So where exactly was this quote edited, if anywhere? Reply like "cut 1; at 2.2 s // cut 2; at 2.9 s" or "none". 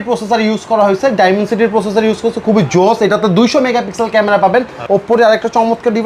cut 1; at 4.8 s